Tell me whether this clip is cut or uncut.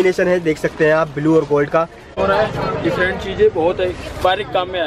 cut